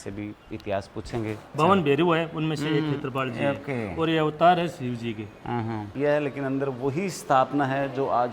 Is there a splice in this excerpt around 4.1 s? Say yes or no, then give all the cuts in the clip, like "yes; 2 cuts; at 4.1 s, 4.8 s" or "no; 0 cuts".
no; 2 cuts; at 1.5 s, 5.9 s